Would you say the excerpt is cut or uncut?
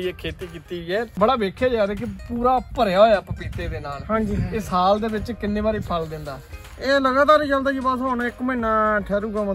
cut